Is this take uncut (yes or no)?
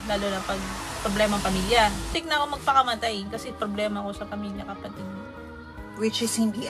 no